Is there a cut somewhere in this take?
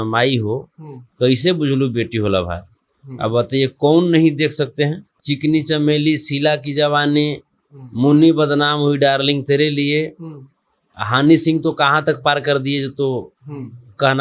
yes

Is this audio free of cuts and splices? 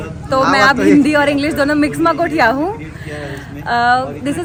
yes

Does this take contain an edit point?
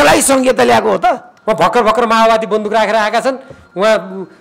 yes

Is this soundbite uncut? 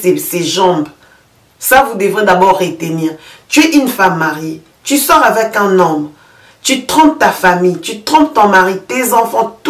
yes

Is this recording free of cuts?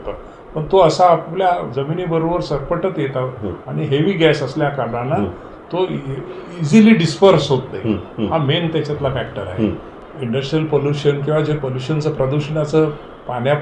no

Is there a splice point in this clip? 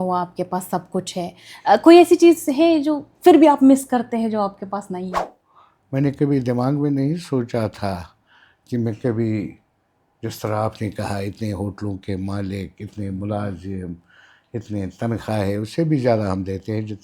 yes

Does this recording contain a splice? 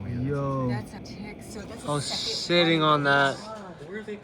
yes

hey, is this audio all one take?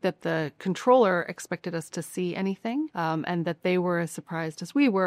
no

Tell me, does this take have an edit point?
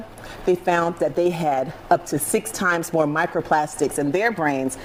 no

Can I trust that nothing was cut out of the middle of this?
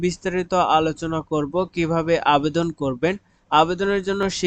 yes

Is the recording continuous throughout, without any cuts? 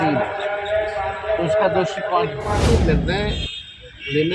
no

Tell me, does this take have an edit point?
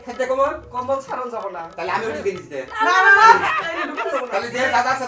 no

